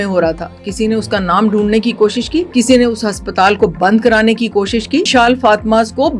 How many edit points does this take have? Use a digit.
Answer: 2